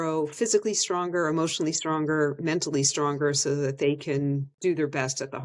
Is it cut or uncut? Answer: uncut